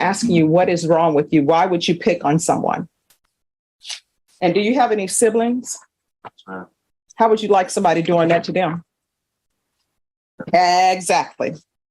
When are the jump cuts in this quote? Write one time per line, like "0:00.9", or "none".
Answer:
0:03.2